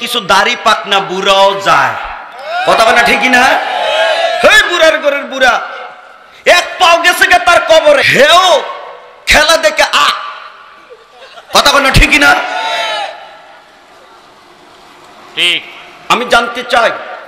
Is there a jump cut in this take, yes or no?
yes